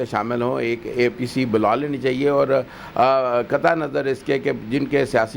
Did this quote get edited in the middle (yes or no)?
no